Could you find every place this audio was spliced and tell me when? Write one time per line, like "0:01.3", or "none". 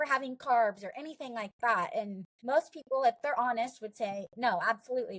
0:02.3